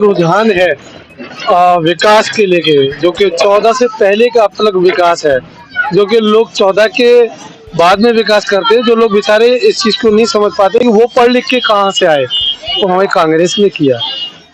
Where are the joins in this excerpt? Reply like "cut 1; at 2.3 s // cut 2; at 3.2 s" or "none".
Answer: none